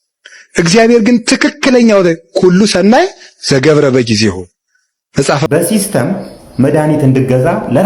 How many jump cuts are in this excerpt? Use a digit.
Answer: 1